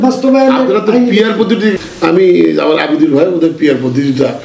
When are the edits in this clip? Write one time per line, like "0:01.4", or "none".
0:01.7